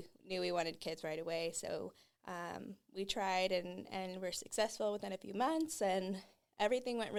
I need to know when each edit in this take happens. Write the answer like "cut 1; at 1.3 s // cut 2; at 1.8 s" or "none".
none